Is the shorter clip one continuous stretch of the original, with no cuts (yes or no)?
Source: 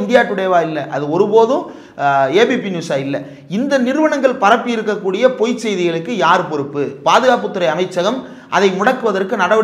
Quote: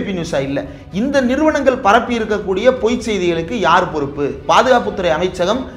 yes